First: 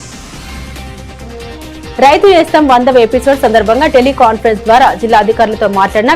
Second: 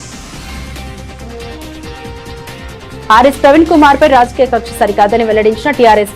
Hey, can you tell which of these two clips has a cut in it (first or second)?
first